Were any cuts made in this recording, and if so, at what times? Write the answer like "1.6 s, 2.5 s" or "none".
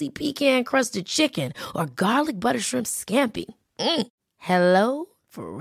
none

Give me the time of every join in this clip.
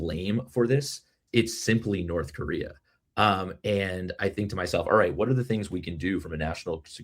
1.2 s

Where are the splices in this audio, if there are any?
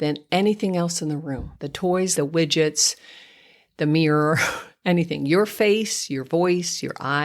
2.1 s

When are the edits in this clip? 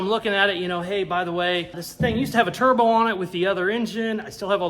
none

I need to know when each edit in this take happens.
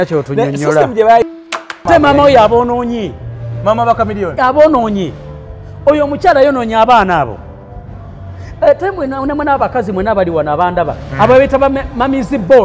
1.9 s

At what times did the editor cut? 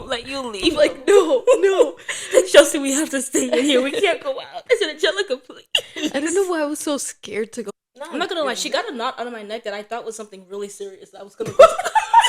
7.7 s

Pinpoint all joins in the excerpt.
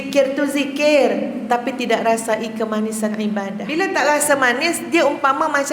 3.6 s

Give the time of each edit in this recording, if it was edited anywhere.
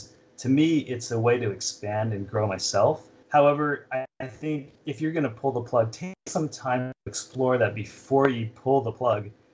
3.1 s

